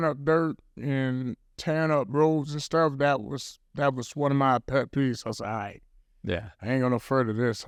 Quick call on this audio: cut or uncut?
uncut